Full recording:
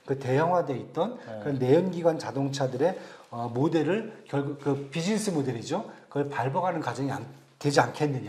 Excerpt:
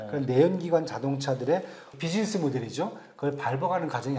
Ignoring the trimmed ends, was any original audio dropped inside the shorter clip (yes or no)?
yes